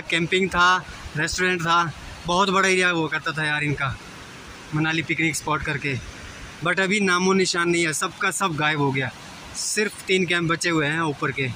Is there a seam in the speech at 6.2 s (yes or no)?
no